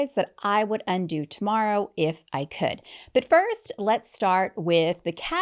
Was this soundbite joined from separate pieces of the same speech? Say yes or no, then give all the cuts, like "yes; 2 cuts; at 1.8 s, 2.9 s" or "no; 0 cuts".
no; 0 cuts